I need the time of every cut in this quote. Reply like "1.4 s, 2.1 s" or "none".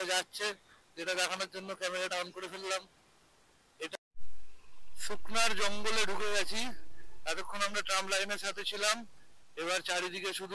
3.9 s